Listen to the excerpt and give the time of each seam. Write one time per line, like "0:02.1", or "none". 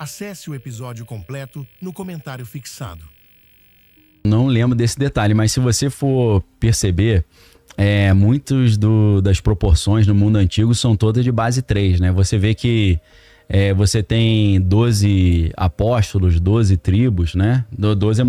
0:04.2

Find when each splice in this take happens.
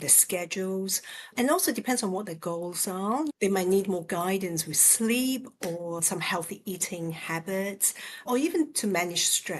0:03.3

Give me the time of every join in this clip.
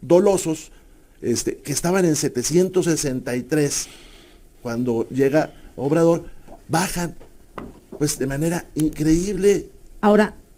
none

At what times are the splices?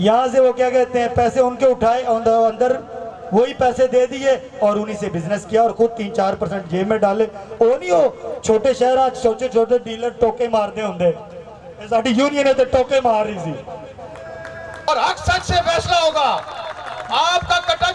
0:14.9

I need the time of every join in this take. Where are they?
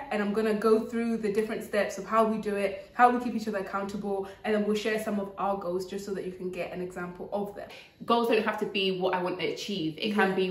0:07.7

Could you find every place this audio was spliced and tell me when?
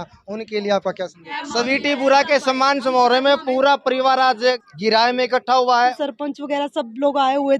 0:01.3
0:04.7
0:06.0

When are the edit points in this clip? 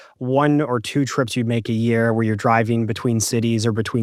none

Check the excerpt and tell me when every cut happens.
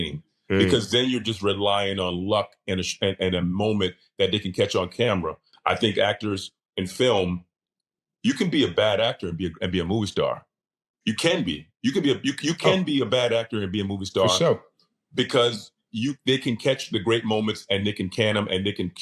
0:05.5

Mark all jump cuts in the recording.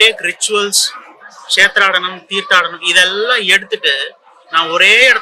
none

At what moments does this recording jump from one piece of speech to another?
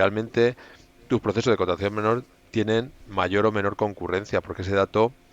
none

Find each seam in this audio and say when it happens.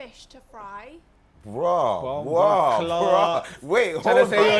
none

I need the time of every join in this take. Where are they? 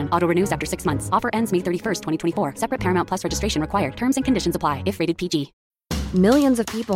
0:05.6

